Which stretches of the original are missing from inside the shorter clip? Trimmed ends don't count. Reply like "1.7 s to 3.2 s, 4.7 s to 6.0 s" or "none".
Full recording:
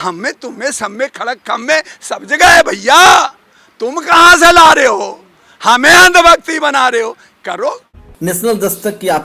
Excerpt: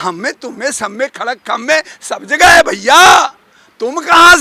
none